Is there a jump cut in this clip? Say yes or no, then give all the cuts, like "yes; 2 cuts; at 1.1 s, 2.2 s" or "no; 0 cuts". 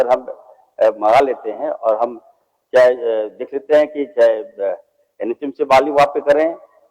no; 0 cuts